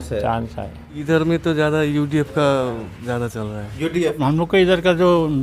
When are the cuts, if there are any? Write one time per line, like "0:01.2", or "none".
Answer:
0:01.0
0:04.2